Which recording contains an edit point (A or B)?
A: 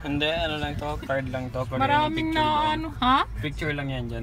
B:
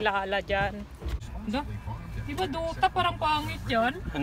B